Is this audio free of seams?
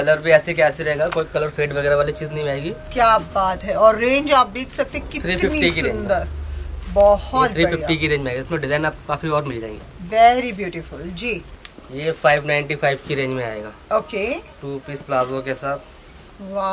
yes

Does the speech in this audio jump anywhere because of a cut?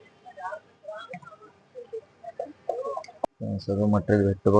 yes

